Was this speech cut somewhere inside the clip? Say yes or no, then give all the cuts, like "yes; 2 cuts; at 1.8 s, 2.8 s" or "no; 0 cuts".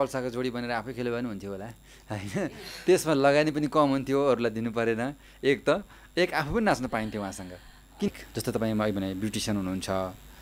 yes; 1 cut; at 8.1 s